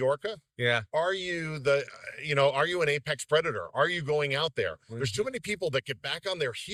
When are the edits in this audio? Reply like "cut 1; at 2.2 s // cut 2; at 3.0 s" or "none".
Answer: none

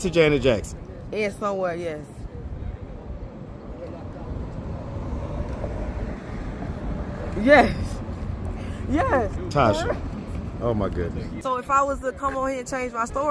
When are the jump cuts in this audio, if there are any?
cut 1; at 11.3 s

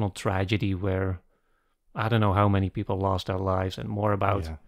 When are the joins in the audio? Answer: none

